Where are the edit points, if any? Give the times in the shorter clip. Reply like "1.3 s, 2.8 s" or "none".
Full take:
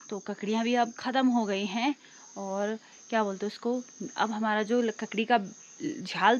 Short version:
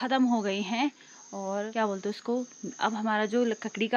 1.7 s